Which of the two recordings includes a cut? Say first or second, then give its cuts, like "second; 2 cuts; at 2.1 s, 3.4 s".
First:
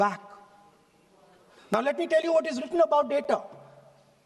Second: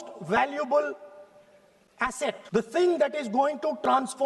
second; 1 cut; at 2.4 s